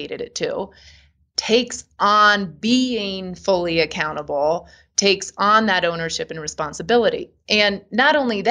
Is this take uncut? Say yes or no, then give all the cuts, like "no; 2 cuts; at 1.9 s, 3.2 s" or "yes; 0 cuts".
yes; 0 cuts